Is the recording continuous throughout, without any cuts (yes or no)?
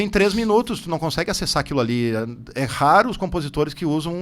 yes